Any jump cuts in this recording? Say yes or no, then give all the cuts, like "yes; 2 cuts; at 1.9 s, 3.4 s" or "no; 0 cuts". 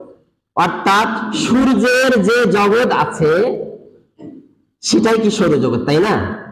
no; 0 cuts